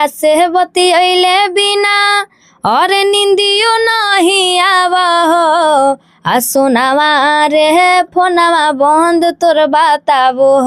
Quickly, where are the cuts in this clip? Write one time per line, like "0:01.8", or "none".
none